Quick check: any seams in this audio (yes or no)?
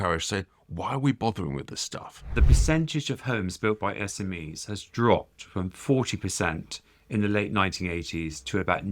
yes